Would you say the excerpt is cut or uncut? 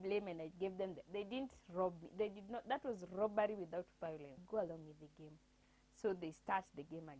cut